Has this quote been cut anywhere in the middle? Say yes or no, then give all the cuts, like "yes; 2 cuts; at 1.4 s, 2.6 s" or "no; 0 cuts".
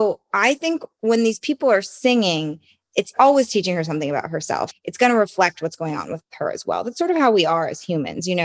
yes; 1 cut; at 3.1 s